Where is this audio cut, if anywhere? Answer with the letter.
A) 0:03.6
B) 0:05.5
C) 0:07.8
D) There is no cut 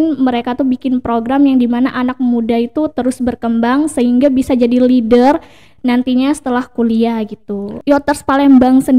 C